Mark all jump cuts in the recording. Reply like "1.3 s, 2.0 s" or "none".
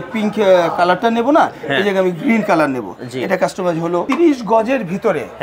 4.1 s